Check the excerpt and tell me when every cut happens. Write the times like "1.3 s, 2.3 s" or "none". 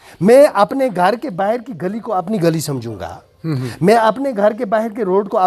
none